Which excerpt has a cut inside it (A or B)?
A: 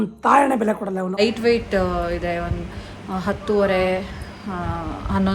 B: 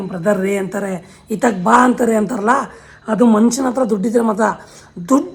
A